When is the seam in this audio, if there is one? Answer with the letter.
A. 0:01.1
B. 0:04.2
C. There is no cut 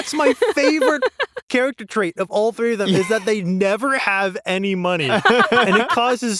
C